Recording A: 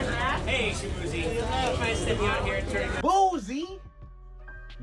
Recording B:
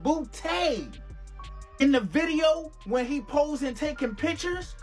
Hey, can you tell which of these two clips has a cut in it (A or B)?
A